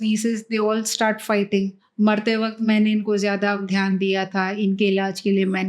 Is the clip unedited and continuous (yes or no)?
no